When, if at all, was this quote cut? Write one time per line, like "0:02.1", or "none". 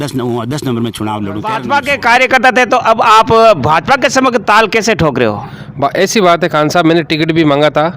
0:01.6

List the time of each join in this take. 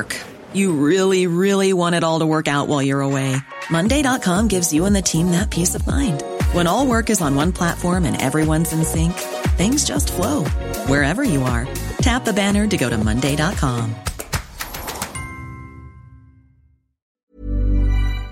0:17.0

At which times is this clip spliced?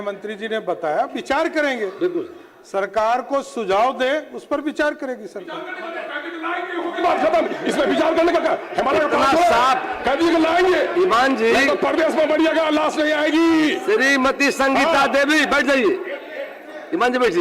none

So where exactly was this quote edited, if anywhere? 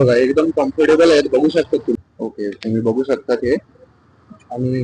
0:02.0

